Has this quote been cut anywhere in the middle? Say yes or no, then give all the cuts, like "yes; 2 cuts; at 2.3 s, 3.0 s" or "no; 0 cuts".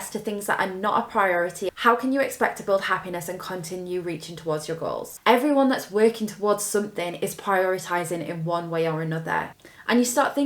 yes; 3 cuts; at 1.7 s, 5.2 s, 9.5 s